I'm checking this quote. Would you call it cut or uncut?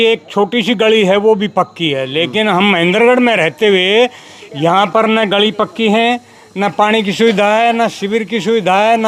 uncut